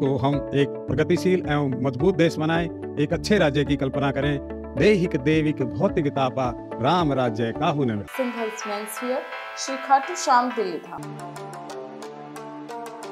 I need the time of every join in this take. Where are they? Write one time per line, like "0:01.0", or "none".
0:08.1
0:10.9

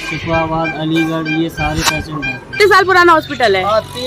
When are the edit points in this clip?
0:02.5

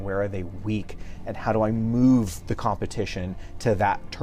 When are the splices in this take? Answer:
none

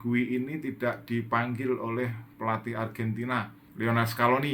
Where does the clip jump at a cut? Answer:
0:03.6

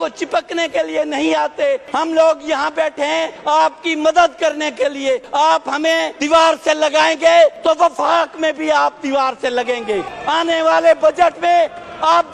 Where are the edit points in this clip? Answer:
0:01.9
0:03.3
0:05.3
0:06.1
0:07.6
0:10.1

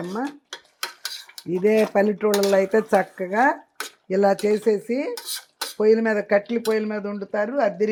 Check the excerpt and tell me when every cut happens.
none

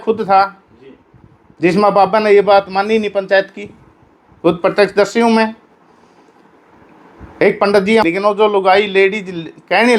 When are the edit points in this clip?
0:08.0

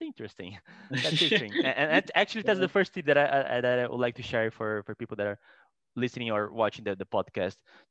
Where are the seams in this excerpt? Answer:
none

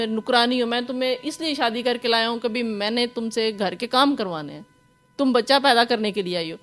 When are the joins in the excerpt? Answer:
none

